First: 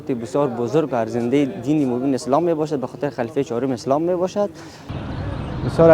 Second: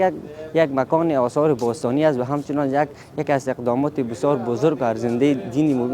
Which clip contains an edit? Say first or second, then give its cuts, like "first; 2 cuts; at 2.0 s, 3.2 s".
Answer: first; 1 cut; at 4.9 s